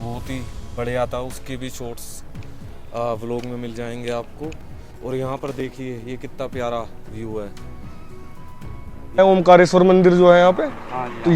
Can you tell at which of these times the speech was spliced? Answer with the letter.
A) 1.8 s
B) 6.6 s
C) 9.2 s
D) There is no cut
C